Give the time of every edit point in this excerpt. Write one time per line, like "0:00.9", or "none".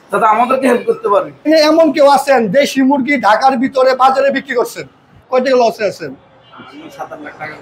0:01.5
0:05.1